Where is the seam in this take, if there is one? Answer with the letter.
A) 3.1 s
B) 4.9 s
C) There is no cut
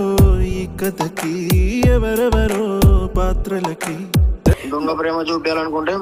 C